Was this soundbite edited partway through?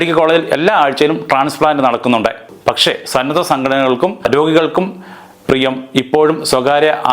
yes; 2 cuts; at 2.5 s, 4.3 s

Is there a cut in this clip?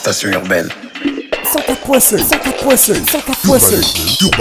no; 0 cuts

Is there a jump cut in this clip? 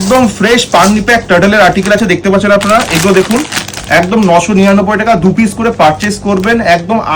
no; 0 cuts

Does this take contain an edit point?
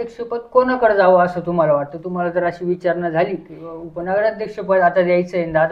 no; 0 cuts

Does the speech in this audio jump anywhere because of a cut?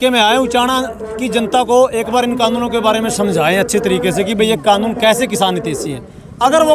no; 0 cuts

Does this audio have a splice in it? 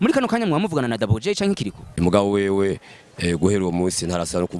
yes; 1 cut; at 1.8 s

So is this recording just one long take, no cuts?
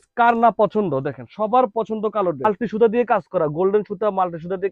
no; 1 cut; at 2.5 s

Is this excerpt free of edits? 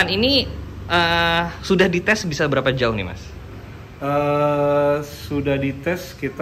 yes; 0 cuts

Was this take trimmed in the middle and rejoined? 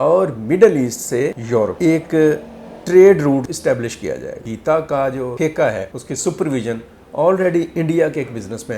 yes; 5 cuts; at 1.7 s, 3.5 s, 4.5 s, 5.3 s, 6.0 s

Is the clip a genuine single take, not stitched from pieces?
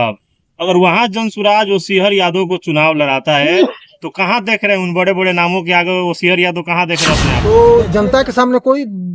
no; 1 cut; at 7.4 s

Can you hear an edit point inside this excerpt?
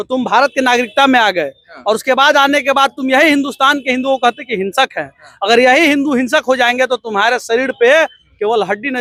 no; 0 cuts

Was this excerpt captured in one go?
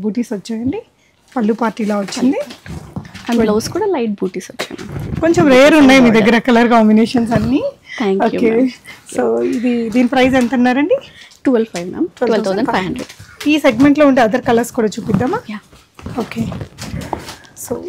yes; 0 cuts

